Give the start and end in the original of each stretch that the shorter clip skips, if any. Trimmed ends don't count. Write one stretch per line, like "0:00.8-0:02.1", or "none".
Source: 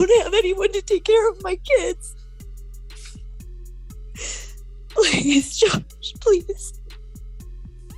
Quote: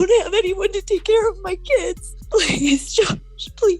0:02.1-0:04.7